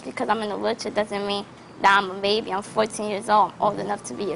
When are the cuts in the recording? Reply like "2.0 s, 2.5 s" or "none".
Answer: 3.2 s